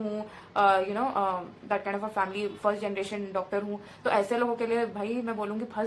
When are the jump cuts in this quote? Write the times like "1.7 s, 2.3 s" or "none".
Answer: none